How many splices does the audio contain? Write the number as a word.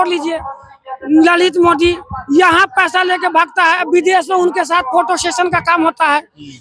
zero